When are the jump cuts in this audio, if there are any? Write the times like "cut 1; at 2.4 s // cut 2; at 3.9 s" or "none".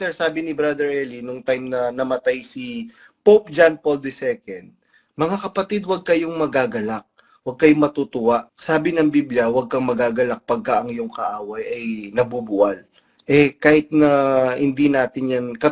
cut 1; at 8.5 s